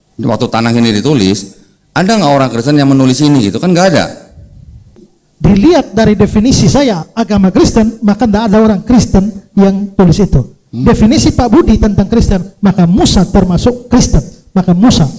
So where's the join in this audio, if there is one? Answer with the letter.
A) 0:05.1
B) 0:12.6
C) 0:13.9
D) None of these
A